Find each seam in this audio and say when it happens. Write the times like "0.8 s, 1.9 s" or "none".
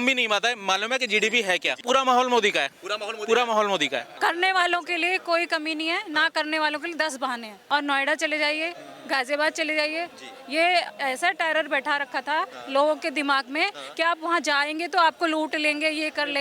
1.8 s, 4.1 s, 7.5 s